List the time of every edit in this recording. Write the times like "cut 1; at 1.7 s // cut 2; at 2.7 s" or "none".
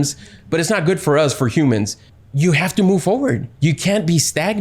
cut 1; at 2.0 s // cut 2; at 3.5 s